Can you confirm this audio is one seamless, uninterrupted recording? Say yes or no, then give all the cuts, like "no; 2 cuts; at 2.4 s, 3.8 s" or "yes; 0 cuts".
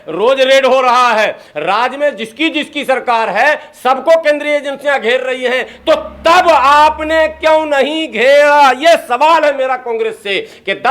yes; 0 cuts